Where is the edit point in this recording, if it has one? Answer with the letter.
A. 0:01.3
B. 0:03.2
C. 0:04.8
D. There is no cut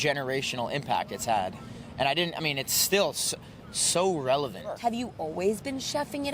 C